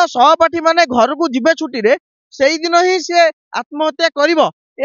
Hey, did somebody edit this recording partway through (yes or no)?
no